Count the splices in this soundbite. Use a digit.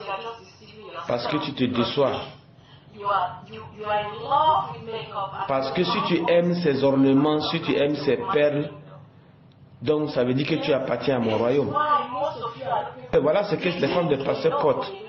1